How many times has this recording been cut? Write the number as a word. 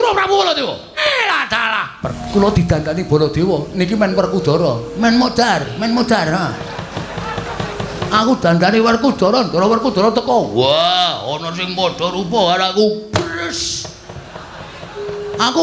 two